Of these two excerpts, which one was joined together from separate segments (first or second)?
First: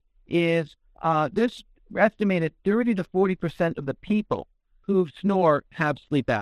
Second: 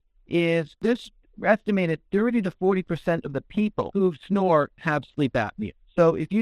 second